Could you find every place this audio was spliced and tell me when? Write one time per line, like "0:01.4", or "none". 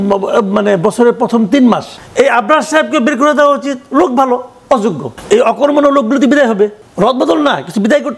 0:02.0
0:05.1
0:06.8

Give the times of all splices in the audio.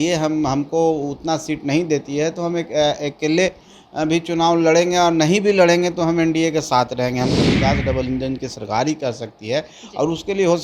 0:07.4

